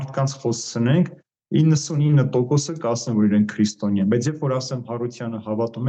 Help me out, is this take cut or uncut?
uncut